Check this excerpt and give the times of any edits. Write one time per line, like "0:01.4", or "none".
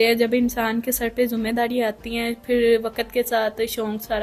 none